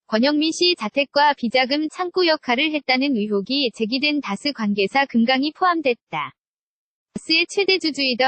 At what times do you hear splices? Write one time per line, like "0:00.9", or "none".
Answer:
0:07.2